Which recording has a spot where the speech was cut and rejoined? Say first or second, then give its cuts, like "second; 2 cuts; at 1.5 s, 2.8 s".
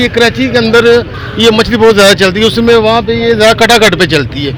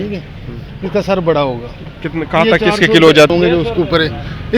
second; 1 cut; at 3.3 s